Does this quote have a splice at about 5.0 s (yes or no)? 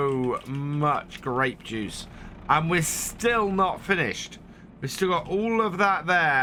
no